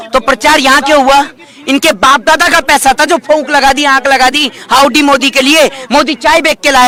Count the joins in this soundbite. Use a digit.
0